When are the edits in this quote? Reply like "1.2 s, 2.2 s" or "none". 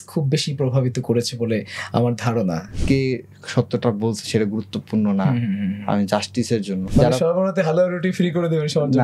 2.7 s, 6.8 s